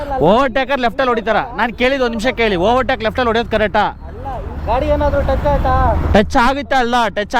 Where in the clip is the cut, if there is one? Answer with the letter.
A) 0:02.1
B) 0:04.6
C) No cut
B